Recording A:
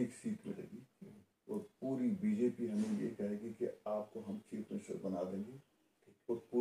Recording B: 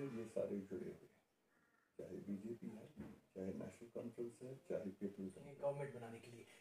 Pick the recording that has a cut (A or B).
B